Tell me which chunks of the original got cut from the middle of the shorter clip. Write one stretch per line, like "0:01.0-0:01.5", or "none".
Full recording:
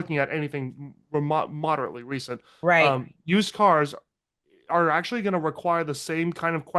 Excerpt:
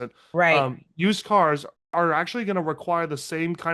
0:04.0-0:04.5